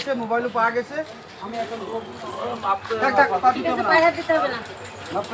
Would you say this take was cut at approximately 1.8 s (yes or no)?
yes